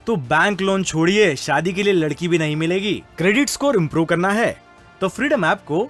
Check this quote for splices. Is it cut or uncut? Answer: uncut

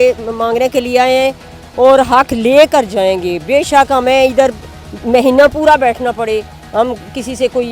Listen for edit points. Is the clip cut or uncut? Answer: uncut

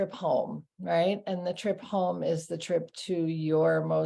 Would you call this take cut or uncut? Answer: uncut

